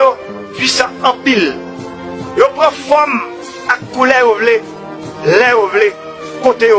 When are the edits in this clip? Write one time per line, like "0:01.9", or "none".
0:05.4